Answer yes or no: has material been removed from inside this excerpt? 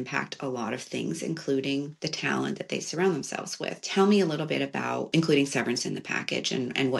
yes